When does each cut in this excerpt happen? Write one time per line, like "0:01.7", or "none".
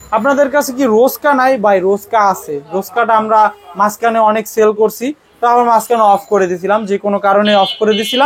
none